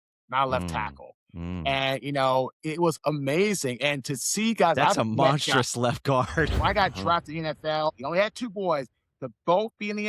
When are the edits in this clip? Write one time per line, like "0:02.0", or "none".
0:06.5
0:08.0

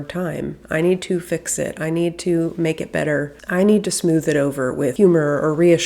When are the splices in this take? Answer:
0:04.9

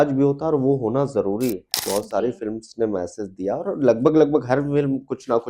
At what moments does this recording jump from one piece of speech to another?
0:01.8

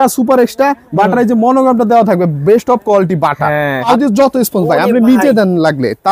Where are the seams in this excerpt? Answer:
0:03.9

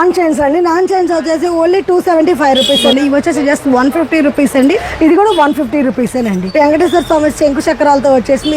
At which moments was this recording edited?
0:02.9
0:04.9
0:06.4

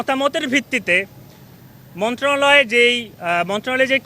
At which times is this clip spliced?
none

